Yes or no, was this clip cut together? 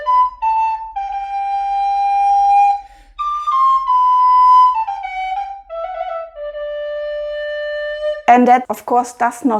no